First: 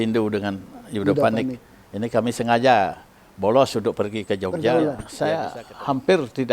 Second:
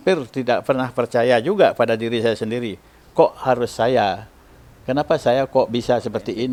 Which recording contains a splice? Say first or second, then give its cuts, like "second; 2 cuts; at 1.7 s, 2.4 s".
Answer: first; 1 cut; at 4.6 s